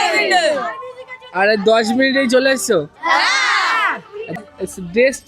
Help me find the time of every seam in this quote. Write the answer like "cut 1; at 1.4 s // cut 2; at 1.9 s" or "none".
cut 1; at 4.4 s